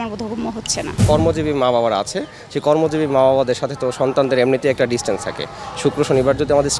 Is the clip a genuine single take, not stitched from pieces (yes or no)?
no